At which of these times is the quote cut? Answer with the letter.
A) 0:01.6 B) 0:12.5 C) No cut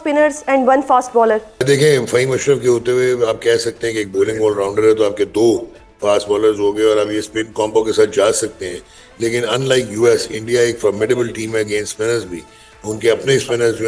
A